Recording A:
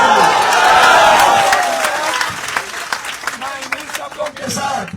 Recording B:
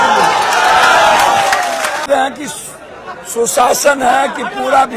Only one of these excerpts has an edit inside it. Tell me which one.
B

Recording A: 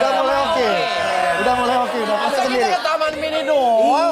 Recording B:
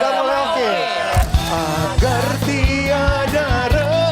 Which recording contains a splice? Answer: B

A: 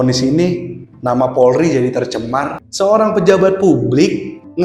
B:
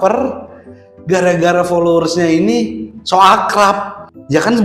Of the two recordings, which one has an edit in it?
A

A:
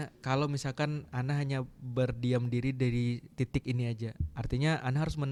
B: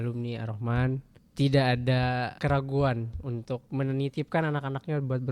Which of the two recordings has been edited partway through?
B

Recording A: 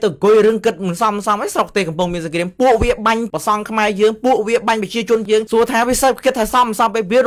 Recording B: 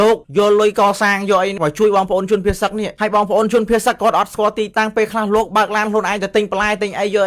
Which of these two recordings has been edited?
B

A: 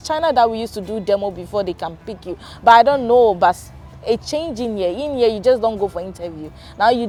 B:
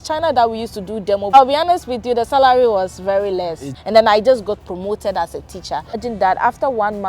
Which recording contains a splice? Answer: B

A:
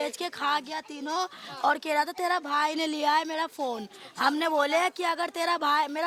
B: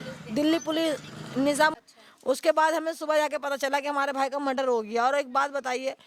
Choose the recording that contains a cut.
B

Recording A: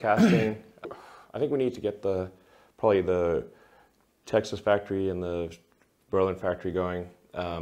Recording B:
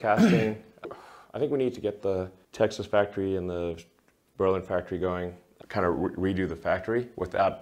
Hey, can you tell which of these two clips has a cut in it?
B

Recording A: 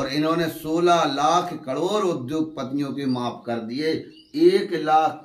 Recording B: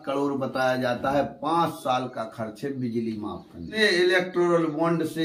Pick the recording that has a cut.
B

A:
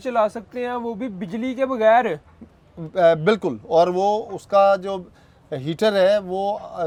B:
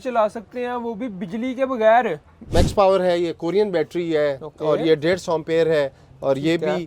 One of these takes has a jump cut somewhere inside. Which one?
B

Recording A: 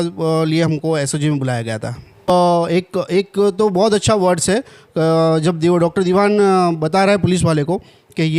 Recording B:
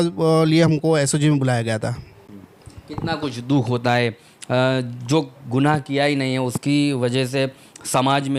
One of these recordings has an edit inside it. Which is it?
A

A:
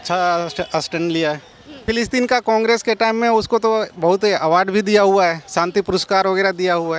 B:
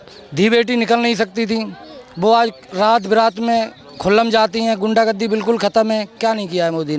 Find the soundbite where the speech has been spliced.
A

